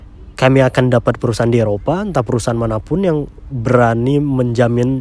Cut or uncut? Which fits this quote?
uncut